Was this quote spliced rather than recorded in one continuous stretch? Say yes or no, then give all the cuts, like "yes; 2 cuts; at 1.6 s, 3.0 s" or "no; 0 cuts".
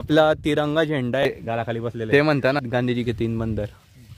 yes; 1 cut; at 1.2 s